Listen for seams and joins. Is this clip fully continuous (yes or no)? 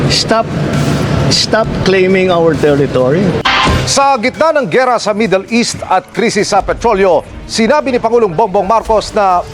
no